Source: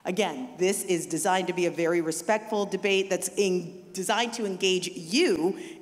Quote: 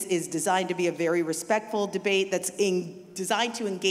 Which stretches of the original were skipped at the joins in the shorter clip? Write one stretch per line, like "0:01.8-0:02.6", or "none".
none